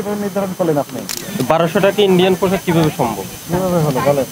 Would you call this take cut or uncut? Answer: cut